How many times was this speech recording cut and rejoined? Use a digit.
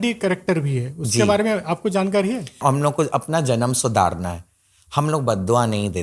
1